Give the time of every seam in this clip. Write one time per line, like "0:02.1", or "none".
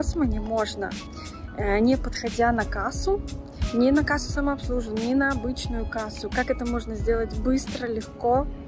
none